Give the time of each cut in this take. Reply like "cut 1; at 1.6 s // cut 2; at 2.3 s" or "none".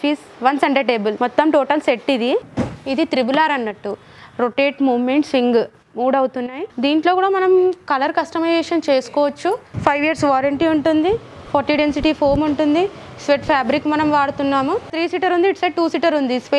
cut 1; at 1.2 s // cut 2; at 2.5 s // cut 3; at 6.6 s // cut 4; at 9.7 s // cut 5; at 14.9 s